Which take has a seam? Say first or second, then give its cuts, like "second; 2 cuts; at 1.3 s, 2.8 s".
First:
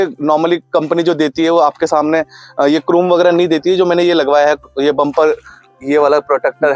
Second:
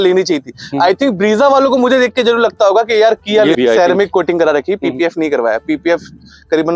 second; 1 cut; at 3.6 s